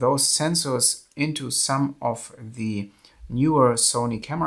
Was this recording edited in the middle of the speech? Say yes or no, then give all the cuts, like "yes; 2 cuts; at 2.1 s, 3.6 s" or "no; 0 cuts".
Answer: no; 0 cuts